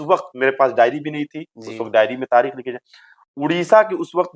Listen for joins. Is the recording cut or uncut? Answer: uncut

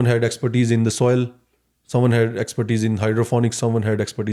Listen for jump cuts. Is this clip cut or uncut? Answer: uncut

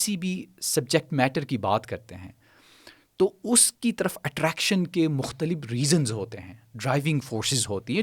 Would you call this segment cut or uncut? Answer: uncut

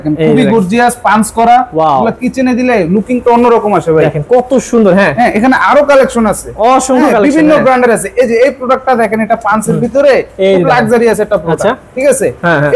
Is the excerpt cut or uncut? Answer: uncut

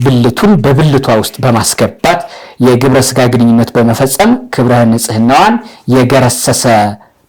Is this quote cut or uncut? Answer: uncut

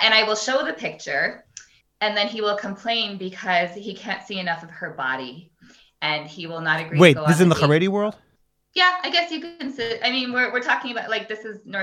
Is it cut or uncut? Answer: uncut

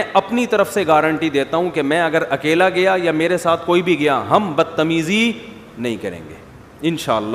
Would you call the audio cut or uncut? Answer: uncut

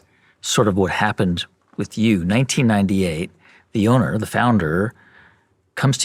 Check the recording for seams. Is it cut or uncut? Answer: uncut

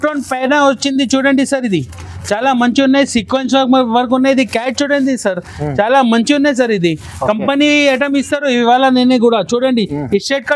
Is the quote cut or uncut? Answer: uncut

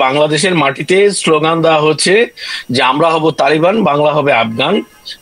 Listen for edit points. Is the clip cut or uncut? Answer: uncut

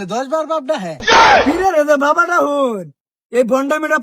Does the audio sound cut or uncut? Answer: uncut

